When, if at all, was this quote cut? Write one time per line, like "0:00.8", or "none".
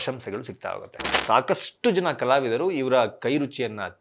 0:01.2